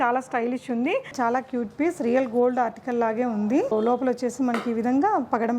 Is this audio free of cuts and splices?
no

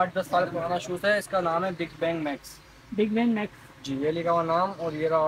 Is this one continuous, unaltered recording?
yes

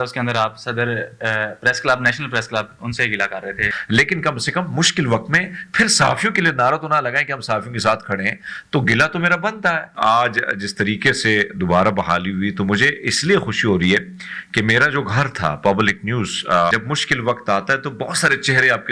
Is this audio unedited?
no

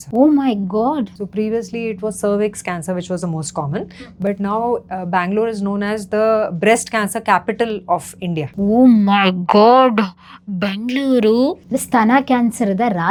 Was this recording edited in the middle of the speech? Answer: no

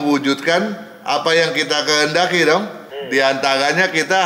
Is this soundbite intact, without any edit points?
no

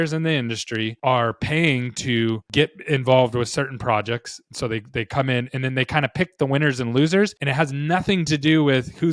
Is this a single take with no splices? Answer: no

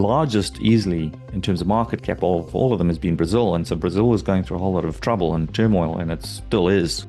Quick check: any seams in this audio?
no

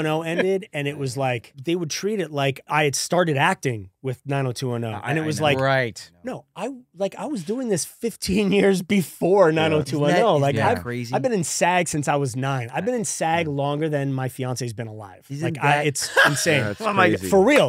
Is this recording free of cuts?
no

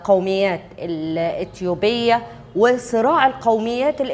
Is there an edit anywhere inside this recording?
no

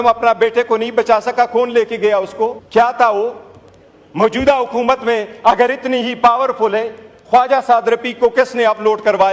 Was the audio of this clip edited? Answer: yes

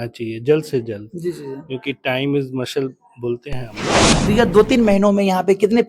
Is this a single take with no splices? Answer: no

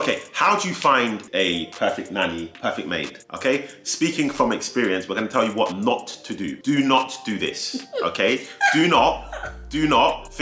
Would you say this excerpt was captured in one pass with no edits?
yes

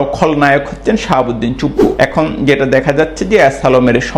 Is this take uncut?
no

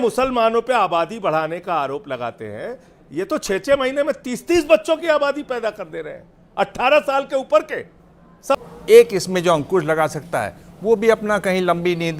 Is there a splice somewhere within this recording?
yes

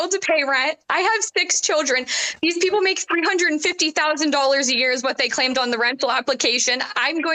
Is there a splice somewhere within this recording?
no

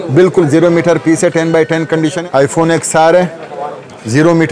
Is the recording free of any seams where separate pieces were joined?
no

